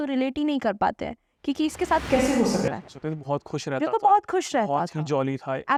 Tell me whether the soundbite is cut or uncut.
uncut